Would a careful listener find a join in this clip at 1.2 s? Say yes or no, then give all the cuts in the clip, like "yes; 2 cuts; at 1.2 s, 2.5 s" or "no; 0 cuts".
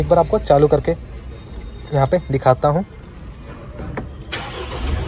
no; 0 cuts